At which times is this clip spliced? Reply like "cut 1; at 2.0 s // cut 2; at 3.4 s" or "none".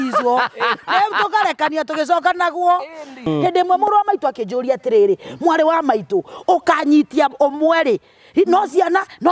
cut 1; at 3.3 s